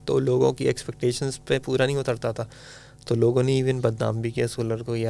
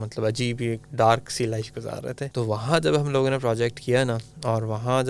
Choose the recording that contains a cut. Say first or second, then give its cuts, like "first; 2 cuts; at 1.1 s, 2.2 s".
second; 1 cut; at 2.2 s